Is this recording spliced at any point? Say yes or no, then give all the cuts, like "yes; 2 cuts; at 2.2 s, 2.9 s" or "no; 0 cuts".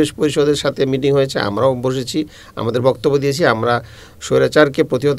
no; 0 cuts